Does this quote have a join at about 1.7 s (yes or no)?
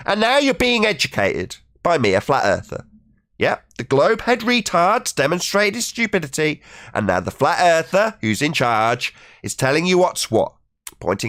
no